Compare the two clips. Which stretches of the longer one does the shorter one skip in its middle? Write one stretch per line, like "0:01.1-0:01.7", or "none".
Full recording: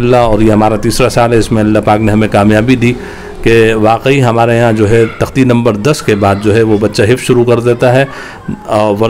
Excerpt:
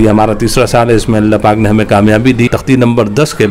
0:03.0-0:05.2